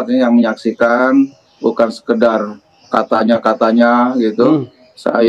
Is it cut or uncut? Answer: uncut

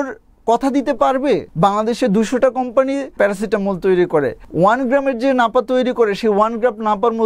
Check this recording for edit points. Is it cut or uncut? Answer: cut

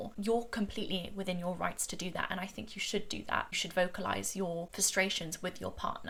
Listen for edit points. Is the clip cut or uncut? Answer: uncut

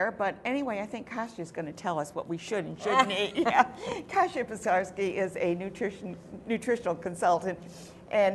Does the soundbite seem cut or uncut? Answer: uncut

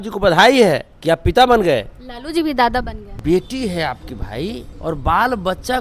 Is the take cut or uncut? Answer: cut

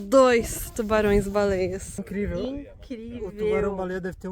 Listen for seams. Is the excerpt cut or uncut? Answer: cut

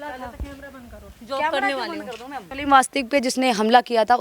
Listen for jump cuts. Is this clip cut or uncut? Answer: cut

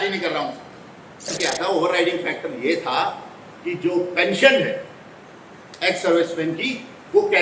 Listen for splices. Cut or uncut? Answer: cut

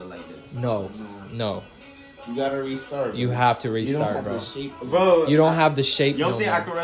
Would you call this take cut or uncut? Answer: uncut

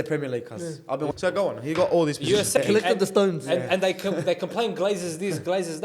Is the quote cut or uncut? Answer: cut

